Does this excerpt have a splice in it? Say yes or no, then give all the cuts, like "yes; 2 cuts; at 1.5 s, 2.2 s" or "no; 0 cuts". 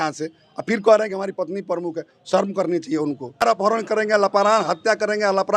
yes; 1 cut; at 3.4 s